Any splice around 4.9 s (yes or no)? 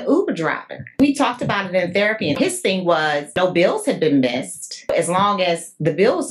yes